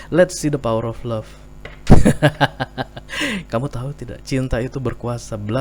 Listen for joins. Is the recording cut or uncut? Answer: uncut